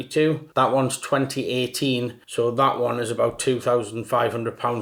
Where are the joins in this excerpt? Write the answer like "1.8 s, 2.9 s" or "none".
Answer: none